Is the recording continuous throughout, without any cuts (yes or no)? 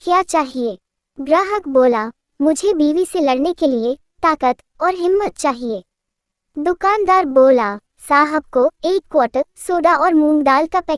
yes